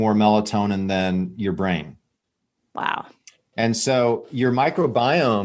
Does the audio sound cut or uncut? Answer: uncut